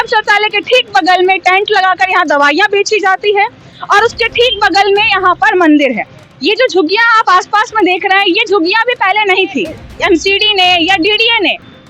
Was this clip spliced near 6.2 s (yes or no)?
no